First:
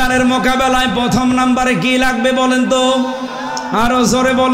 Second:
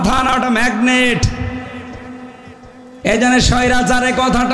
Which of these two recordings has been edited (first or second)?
second